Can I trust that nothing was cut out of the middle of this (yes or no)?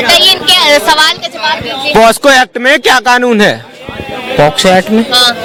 yes